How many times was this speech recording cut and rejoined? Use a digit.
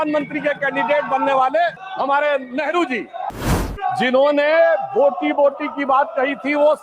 2